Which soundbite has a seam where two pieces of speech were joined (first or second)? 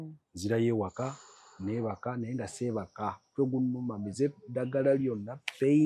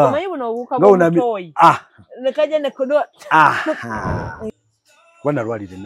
second